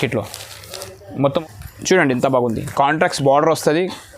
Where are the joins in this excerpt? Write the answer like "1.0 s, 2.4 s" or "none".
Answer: 1.4 s